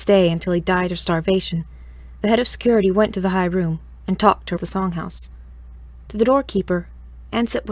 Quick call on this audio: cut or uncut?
uncut